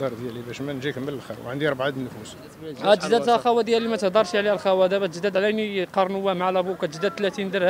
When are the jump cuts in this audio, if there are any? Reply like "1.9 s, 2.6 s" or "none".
2.6 s